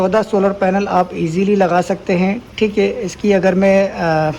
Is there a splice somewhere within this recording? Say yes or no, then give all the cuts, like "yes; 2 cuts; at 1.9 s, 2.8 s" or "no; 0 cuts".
no; 0 cuts